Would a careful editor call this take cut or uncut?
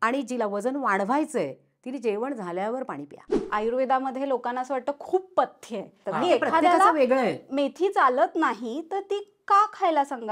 cut